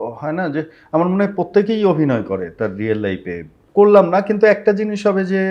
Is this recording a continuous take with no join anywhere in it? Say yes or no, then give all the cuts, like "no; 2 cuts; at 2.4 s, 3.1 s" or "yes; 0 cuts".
no; 1 cut; at 3.6 s